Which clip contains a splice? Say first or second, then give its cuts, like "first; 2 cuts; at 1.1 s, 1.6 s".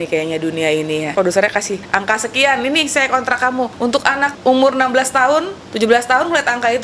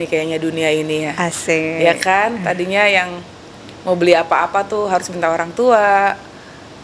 first; 4 cuts; at 1.1 s, 1.8 s, 3.9 s, 5.6 s